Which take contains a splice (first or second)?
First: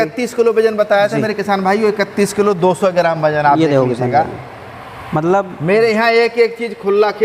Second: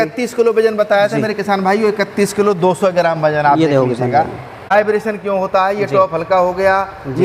second